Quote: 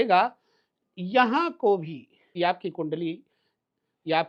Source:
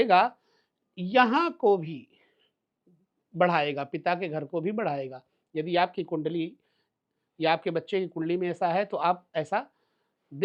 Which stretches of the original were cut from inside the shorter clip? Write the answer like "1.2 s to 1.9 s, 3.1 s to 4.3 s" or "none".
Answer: 2.3 s to 5.7 s